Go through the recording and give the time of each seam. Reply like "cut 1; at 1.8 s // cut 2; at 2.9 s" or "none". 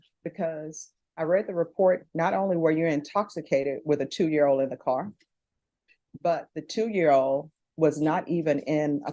none